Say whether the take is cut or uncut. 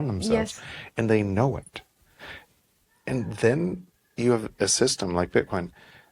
uncut